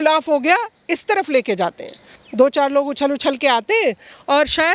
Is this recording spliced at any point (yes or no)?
yes